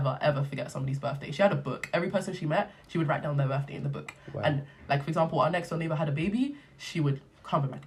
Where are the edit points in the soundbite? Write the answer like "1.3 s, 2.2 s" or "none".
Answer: none